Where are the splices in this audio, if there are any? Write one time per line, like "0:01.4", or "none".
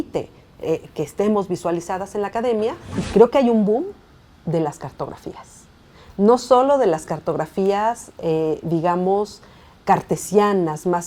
0:02.9